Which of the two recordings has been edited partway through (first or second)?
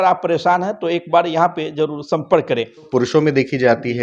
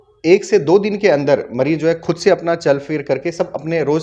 first